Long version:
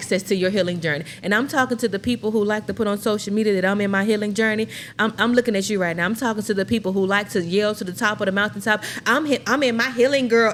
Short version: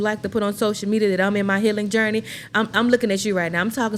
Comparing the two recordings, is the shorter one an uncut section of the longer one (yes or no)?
yes